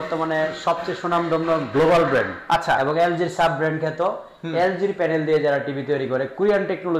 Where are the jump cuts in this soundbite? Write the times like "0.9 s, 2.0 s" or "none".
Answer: none